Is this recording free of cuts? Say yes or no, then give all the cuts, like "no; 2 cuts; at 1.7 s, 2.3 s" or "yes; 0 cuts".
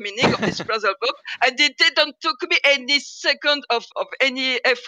yes; 0 cuts